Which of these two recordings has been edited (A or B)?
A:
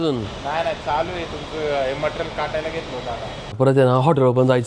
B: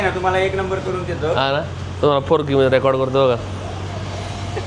A